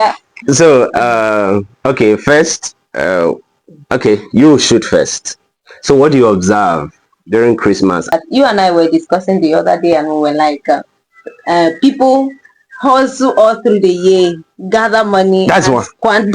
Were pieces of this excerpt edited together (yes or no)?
yes